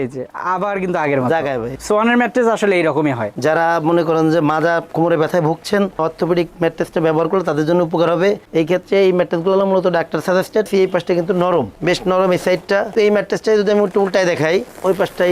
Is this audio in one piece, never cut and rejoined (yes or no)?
no